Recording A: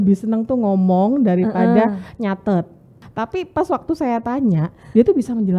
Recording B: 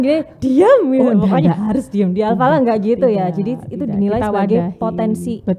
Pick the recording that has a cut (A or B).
A